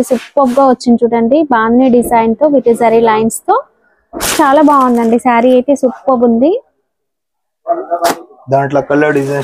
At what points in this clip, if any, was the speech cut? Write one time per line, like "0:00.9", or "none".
none